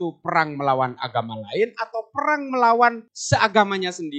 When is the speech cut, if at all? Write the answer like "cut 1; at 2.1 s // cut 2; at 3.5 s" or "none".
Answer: cut 1; at 3.1 s